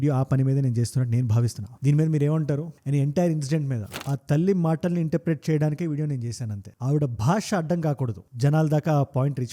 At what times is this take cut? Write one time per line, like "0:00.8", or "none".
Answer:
0:03.9